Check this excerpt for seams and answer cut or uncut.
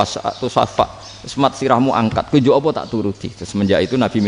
uncut